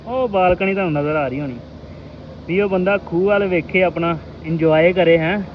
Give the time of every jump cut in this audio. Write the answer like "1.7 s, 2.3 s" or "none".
none